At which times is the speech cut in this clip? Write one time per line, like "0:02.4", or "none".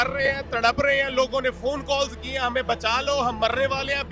none